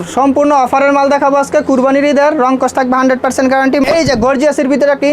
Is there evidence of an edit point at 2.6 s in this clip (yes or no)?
no